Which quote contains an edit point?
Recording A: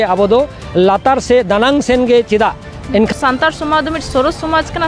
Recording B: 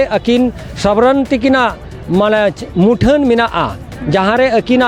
A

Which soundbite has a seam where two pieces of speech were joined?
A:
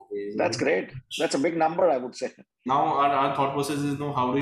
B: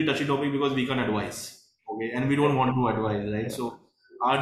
A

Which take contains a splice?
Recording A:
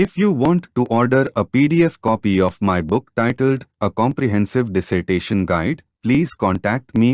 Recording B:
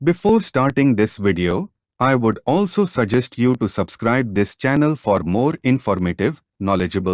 B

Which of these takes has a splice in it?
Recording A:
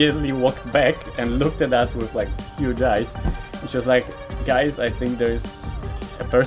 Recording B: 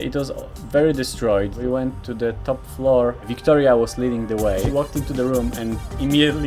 B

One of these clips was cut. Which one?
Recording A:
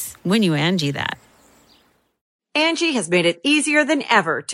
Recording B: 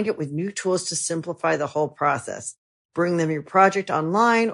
A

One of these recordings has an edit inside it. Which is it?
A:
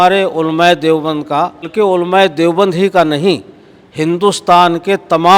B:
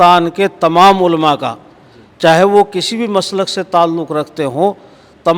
A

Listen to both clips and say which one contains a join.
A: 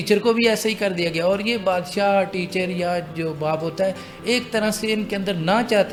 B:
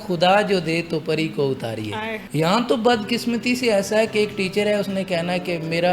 B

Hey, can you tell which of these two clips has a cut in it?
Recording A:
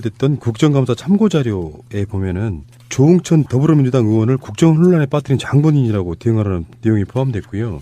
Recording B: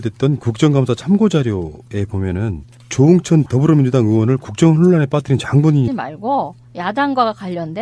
A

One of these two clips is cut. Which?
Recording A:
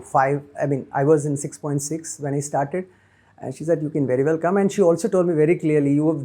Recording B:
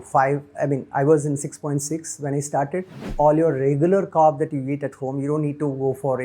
B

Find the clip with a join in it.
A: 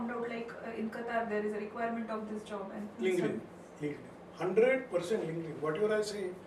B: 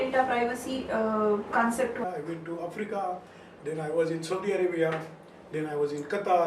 B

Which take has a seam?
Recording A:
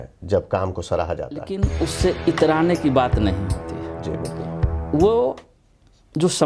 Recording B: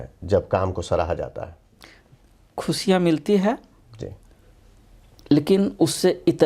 A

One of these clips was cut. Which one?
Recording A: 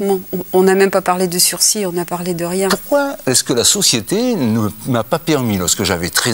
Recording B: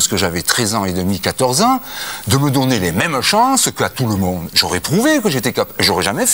A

